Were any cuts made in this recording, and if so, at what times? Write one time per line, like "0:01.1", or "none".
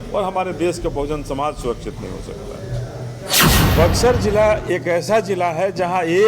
0:03.5

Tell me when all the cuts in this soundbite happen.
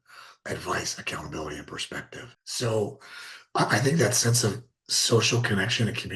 0:02.4

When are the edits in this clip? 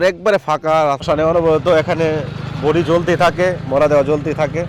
0:01.0

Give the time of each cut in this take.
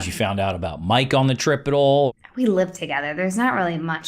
0:02.1

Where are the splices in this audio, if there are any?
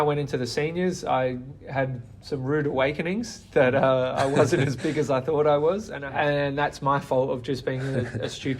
0:06.0

